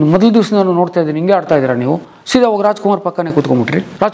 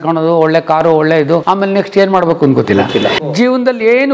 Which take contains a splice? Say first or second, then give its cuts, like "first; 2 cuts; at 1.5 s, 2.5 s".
second; 2 cuts; at 1.4 s, 3.2 s